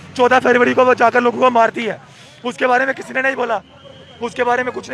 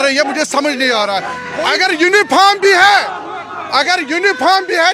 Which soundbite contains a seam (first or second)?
second